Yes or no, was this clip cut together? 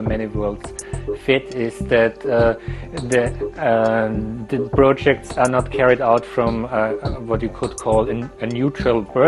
no